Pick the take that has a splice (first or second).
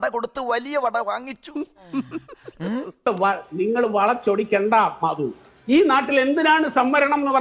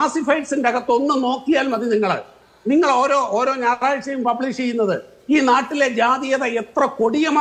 first